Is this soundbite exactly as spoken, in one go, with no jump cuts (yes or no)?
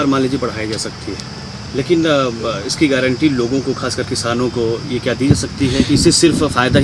yes